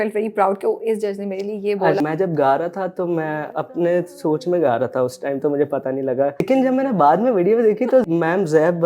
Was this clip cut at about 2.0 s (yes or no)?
yes